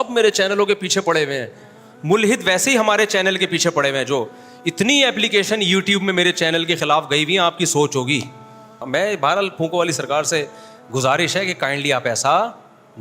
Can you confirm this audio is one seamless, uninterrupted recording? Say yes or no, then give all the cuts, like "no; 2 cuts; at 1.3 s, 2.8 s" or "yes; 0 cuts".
no; 1 cut; at 8.8 s